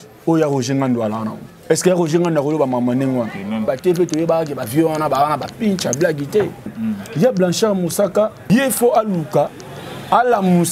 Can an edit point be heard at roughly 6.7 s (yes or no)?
yes